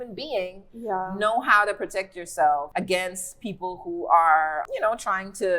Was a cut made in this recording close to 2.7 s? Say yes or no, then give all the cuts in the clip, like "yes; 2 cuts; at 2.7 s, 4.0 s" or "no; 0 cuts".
yes; 2 cuts; at 2.7 s, 4.6 s